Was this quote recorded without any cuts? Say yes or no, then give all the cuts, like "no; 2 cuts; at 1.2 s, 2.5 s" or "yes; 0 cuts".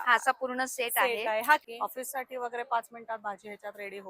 no; 1 cut; at 1.6 s